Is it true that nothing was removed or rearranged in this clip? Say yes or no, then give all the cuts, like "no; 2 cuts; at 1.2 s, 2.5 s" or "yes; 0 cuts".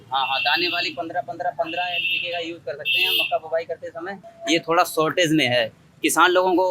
no; 1 cut; at 4.3 s